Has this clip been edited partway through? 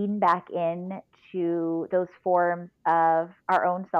no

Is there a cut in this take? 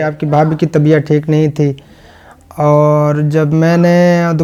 no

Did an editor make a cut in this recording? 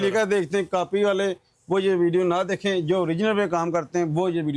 no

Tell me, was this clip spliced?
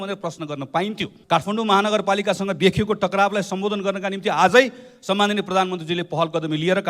yes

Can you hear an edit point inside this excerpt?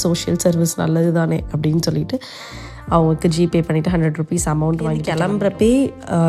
yes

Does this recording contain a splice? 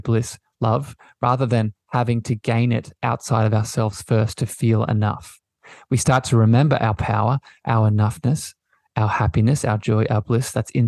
no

